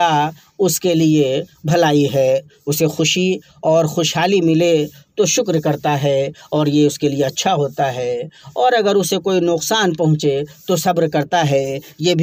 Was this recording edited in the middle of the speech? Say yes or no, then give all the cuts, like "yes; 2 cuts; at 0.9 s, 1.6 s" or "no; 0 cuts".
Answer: no; 0 cuts